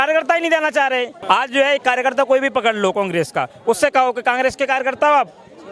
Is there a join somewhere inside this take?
yes; 1 cut; at 1.1 s

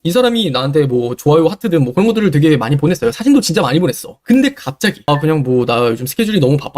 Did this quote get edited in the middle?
yes; 1 cut; at 5.0 s

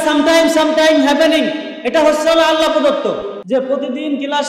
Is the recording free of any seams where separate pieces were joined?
no; 1 cut; at 3.3 s

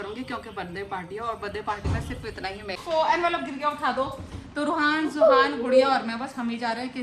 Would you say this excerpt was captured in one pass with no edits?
no; 1 cut; at 2.8 s

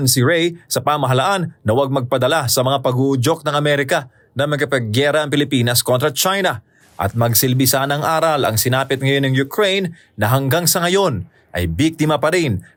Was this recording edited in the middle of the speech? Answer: no; 0 cuts

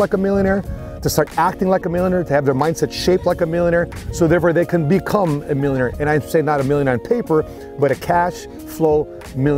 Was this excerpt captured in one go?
yes; 0 cuts

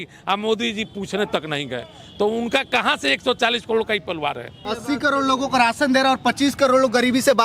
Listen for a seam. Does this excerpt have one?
yes; 1 cut; at 4.7 s

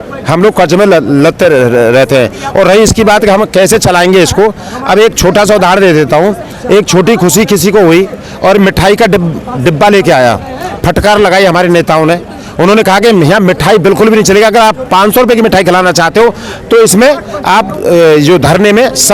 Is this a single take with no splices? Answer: yes; 0 cuts

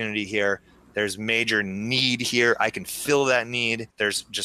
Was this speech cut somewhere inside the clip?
no; 0 cuts

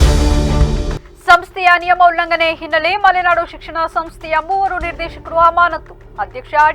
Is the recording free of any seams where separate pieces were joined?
no; 1 cut; at 1.0 s

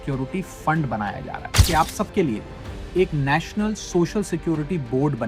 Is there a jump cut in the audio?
yes; 1 cut; at 1.6 s

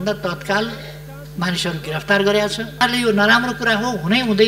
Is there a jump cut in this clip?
yes; 1 cut; at 2.8 s

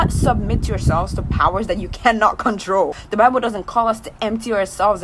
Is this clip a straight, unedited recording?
no; 1 cut; at 3.0 s

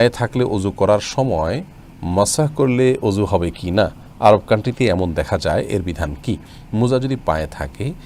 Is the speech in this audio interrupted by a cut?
no; 0 cuts

